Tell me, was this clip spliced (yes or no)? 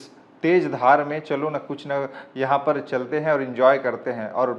no